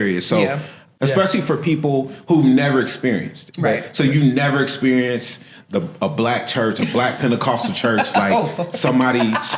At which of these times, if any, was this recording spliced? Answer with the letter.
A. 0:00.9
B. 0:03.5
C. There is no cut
A